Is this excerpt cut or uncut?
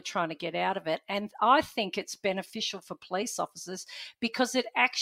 uncut